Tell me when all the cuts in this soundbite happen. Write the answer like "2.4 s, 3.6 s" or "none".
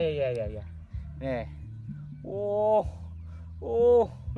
none

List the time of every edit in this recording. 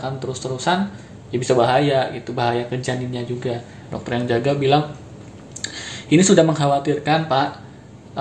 3.9 s

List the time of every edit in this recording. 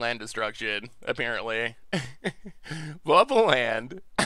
none

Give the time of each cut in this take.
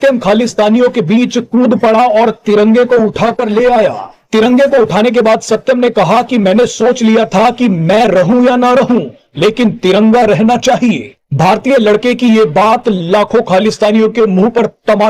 none

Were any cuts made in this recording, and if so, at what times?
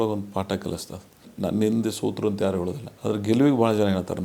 1.3 s, 2.8 s

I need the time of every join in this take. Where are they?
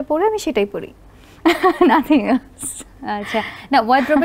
none

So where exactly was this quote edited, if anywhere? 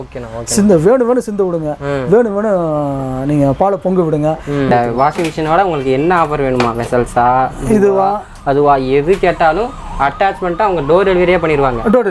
4.7 s

